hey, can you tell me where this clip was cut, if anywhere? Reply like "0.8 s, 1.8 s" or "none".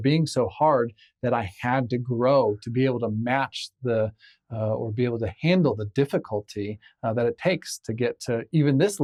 none